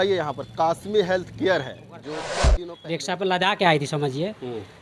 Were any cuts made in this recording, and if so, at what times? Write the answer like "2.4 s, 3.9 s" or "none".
2.3 s